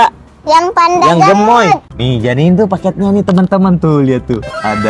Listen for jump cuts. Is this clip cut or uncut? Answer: cut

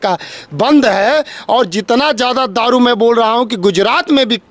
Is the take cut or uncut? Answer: uncut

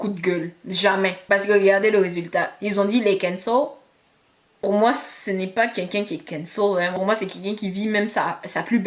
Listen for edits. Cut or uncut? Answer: cut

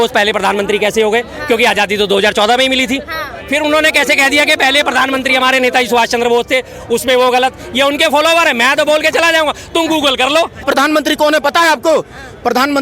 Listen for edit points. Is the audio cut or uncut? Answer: cut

